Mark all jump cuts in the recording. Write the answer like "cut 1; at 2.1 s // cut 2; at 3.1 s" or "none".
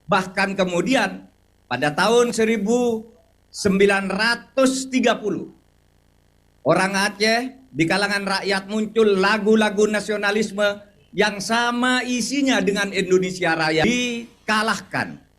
cut 1; at 13.9 s